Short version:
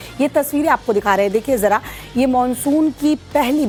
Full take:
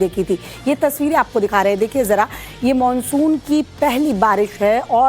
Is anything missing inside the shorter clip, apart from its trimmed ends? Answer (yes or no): no